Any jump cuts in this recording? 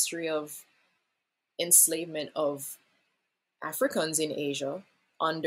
no; 0 cuts

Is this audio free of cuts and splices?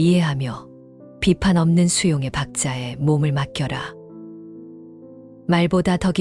no; 2 cuts; at 3.9 s, 5.4 s

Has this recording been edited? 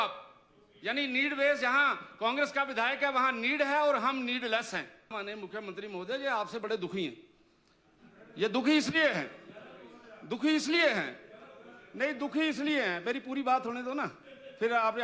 yes; 1 cut; at 5.1 s

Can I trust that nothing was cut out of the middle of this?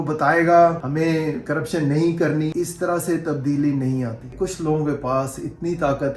no; 3 cuts; at 0.8 s, 2.5 s, 4.3 s

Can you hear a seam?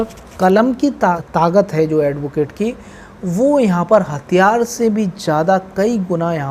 yes; 1 cut; at 1.2 s

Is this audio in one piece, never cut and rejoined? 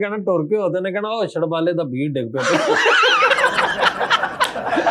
yes; 0 cuts

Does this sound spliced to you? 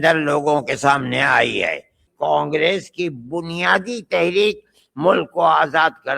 yes; 1 cut; at 2.0 s

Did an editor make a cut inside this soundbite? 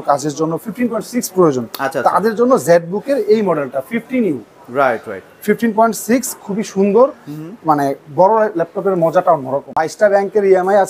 yes; 1 cut; at 9.6 s

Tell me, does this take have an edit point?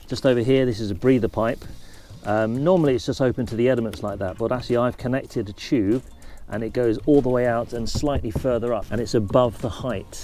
no; 0 cuts

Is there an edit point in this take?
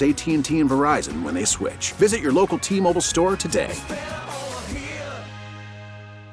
no; 0 cuts

